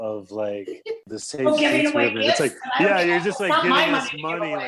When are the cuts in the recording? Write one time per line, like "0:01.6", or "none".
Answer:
0:01.0